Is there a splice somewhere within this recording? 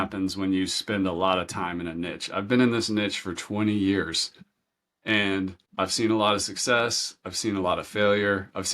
yes; 1 cut; at 5.6 s

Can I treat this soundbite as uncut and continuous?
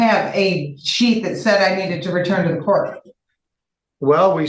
yes; 0 cuts

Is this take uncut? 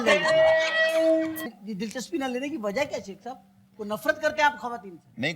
no; 1 cut; at 1.4 s

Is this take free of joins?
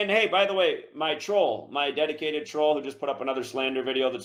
yes; 0 cuts

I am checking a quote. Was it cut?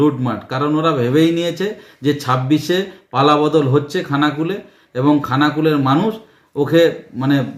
no; 0 cuts

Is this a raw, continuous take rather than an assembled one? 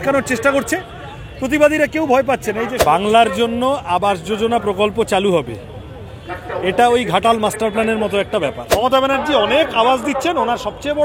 no; 2 cuts; at 2.7 s, 8.6 s

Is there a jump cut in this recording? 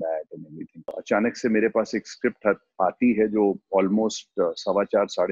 yes; 1 cut; at 1.0 s

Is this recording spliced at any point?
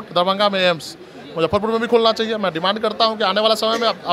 no; 0 cuts

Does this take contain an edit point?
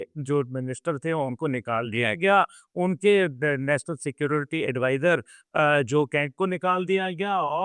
no; 0 cuts

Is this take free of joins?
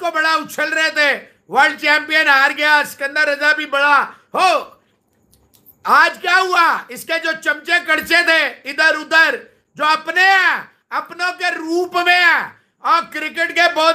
yes; 0 cuts

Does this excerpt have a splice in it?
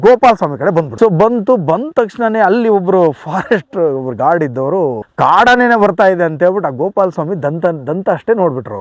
yes; 1 cut; at 0.9 s

